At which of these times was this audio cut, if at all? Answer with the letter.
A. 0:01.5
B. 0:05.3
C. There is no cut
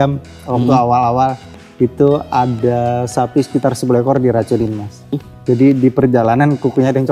B